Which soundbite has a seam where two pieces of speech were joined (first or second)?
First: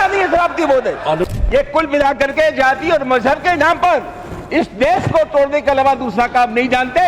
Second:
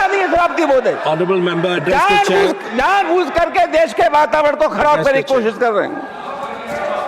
first